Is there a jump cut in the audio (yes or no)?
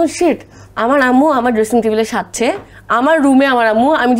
no